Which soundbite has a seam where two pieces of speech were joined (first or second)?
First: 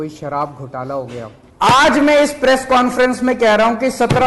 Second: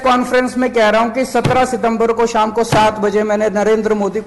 first